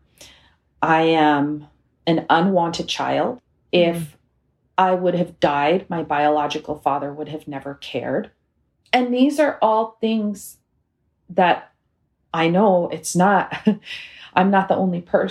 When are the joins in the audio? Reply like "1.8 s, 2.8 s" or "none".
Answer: 3.5 s